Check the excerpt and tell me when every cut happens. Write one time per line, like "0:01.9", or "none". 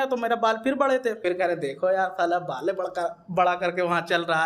0:01.2